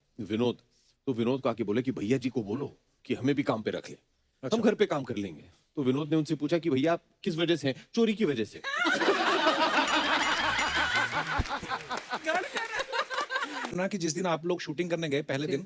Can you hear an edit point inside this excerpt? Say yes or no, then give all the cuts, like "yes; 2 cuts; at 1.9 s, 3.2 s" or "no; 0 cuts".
yes; 1 cut; at 13.7 s